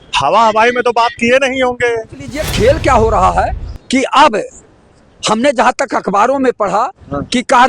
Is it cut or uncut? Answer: cut